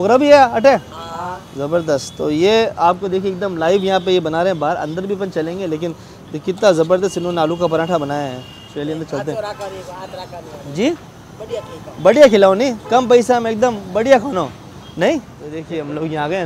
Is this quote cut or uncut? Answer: uncut